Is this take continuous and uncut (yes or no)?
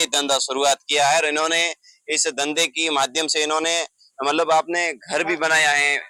yes